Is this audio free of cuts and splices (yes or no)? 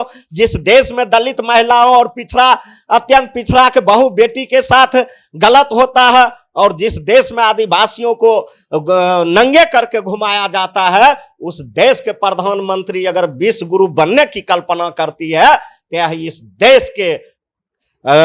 yes